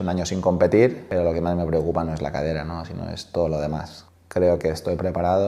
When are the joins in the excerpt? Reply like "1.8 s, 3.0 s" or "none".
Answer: 1.0 s, 4.1 s